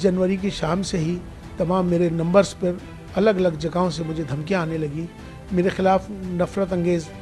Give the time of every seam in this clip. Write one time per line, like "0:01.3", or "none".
none

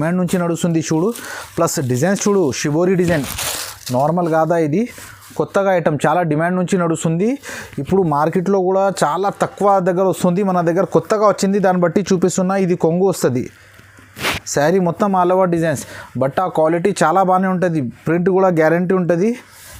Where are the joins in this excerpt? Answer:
none

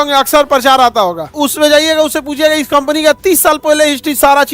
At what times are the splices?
0:01.3

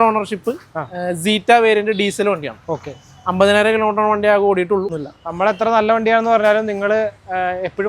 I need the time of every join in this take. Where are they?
0:05.0

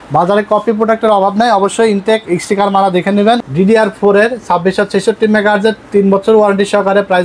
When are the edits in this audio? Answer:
0:03.4

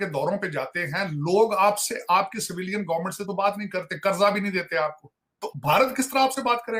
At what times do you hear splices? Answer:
0:05.5

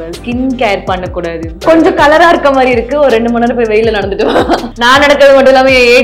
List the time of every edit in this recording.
0:01.6
0:04.7

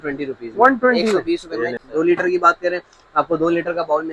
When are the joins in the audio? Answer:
0:01.8

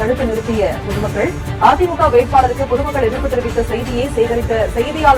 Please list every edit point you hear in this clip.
none

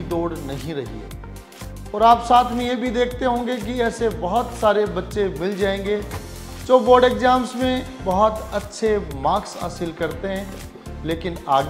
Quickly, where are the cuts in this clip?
none

